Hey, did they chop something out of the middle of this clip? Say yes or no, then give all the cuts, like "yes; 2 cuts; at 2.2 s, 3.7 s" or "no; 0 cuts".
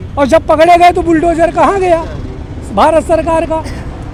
no; 0 cuts